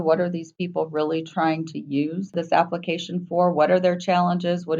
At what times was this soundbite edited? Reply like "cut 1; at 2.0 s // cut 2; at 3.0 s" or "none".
cut 1; at 2.3 s